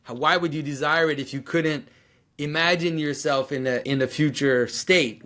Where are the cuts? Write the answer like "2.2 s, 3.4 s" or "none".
3.8 s